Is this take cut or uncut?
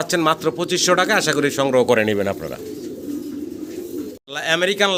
uncut